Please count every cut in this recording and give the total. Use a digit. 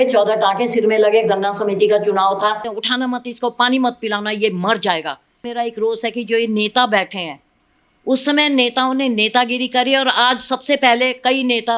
2